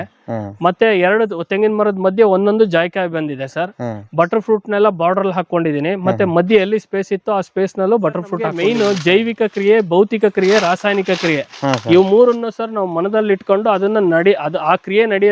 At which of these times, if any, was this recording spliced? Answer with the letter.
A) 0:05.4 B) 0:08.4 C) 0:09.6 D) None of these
B